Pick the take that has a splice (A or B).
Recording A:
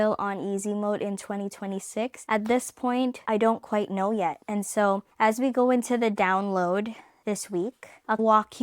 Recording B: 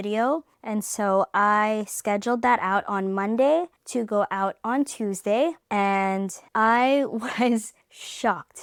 A